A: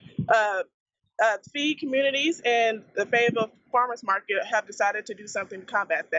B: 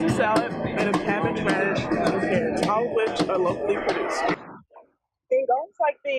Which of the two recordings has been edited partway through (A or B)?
B